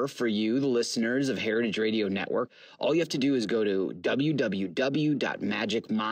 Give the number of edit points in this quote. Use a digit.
1